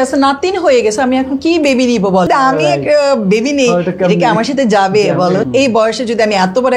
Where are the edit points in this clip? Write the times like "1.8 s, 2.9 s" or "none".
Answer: 2.3 s, 5.5 s